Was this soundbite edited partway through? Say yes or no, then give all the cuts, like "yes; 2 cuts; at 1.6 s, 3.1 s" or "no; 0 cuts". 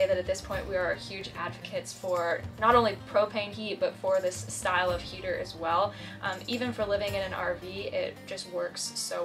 no; 0 cuts